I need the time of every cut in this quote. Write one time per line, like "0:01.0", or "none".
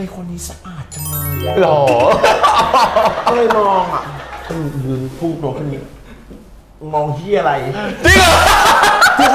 0:04.4